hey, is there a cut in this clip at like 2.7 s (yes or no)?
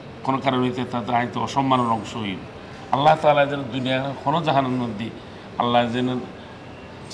no